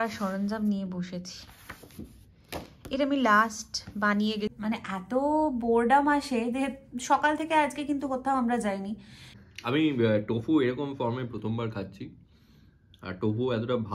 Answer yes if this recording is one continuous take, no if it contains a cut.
no